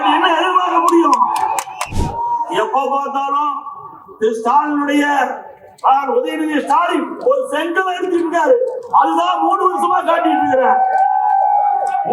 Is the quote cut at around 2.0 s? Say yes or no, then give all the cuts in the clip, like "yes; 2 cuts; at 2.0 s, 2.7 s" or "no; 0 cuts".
yes; 1 cut; at 2.0 s